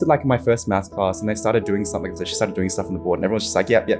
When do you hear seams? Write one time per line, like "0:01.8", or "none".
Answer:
0:02.2